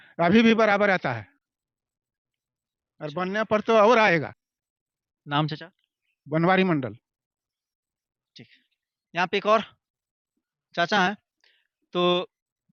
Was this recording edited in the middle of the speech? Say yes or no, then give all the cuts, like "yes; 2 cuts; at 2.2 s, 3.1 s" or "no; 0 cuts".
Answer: no; 0 cuts